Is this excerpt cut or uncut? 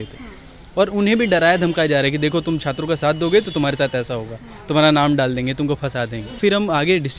cut